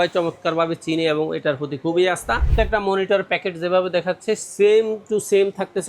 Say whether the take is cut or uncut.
cut